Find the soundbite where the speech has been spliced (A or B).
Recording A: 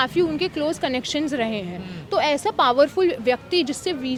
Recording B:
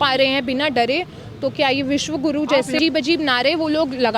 B